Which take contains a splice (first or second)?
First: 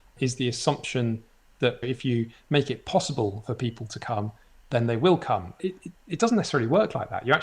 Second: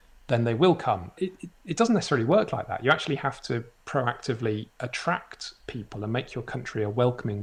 first